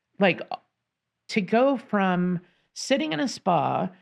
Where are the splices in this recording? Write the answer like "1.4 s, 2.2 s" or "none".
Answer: 1.2 s